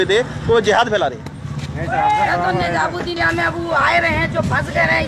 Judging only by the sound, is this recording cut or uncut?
cut